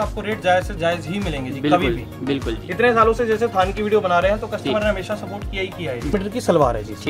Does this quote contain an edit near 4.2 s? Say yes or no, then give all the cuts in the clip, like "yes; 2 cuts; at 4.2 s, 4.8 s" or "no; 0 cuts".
no; 1 cut; at 6.1 s